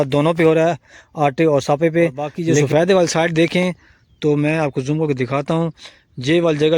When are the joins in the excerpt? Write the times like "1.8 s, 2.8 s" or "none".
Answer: 2.5 s